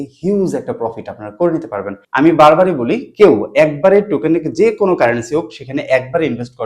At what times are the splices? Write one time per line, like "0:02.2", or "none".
0:02.0